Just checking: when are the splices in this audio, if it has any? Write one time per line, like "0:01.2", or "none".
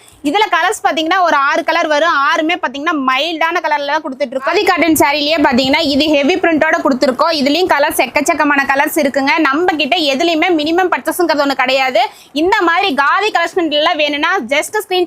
0:04.5